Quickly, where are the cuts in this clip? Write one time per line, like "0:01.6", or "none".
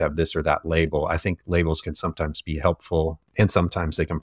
0:03.2